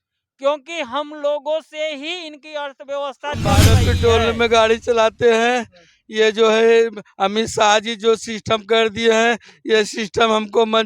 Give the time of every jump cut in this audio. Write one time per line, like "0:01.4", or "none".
0:03.7